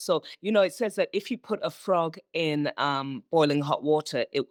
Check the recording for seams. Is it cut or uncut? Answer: uncut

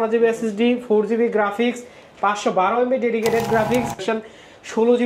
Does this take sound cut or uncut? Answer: cut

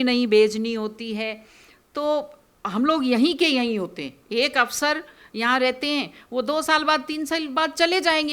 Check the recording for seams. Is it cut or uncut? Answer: uncut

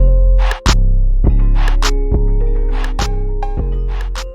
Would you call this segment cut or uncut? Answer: uncut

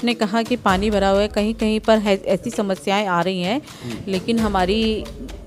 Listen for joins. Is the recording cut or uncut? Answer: uncut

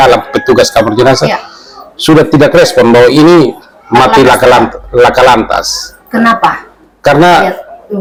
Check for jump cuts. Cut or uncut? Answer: uncut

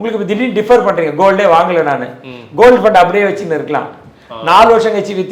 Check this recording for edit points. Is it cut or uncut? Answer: uncut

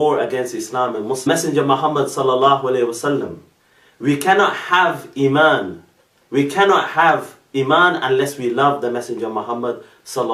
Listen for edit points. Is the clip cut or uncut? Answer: uncut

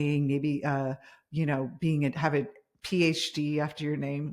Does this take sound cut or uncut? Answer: uncut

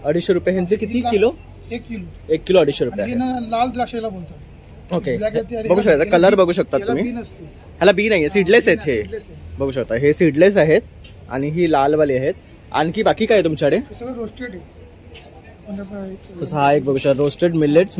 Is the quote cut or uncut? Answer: uncut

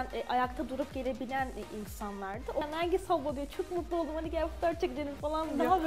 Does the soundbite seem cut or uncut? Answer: cut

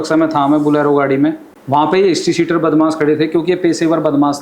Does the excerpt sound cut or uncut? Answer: cut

